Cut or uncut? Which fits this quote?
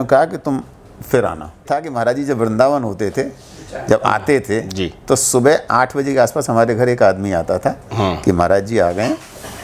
cut